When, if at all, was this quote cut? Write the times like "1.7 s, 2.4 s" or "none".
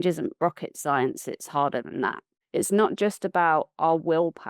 2.3 s